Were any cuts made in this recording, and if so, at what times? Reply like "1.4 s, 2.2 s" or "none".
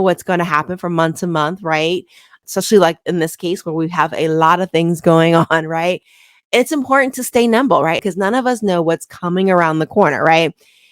none